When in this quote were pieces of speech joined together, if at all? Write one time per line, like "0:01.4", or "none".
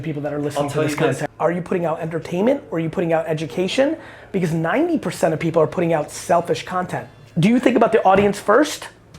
0:01.2
0:07.1